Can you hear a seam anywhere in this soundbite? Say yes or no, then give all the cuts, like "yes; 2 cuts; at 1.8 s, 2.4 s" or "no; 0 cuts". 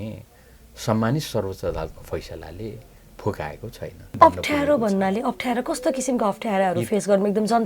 yes; 1 cut; at 4.2 s